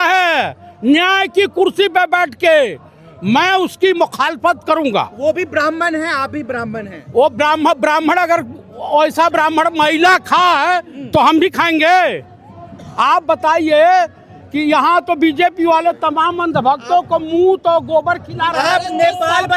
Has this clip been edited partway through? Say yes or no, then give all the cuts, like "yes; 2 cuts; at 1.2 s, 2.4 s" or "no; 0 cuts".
no; 0 cuts